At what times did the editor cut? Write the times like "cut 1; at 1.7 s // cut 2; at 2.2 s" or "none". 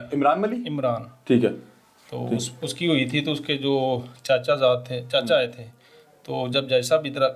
none

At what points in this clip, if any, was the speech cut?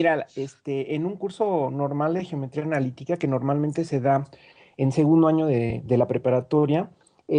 cut 1; at 2.7 s

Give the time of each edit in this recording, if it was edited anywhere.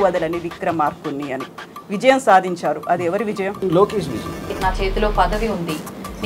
cut 1; at 3.6 s // cut 2; at 4.5 s

